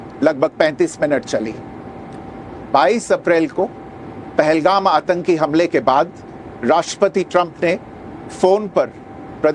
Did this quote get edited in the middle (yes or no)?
yes